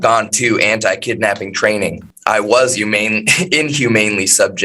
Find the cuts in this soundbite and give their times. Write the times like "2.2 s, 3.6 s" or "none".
2.1 s